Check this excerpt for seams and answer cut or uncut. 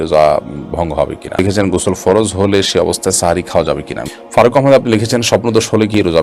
cut